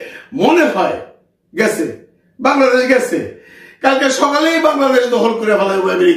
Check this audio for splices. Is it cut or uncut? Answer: uncut